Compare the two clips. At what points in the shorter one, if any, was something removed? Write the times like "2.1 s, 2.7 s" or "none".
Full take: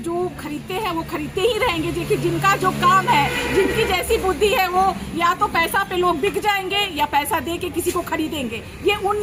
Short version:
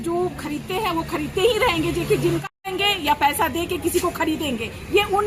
2.5 s